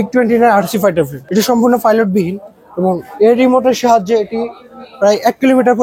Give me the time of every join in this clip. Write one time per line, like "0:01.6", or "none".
0:01.2